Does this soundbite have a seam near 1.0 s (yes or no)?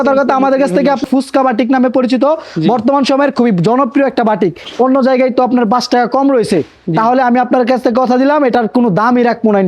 yes